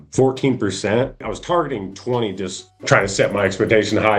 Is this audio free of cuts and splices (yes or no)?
no